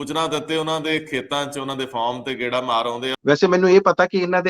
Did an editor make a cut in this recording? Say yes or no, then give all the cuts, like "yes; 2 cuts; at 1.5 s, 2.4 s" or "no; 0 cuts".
yes; 1 cut; at 3.1 s